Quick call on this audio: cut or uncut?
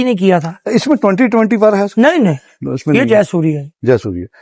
uncut